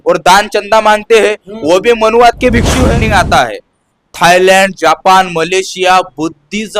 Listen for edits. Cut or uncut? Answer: cut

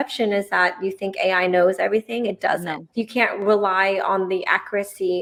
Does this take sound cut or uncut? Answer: uncut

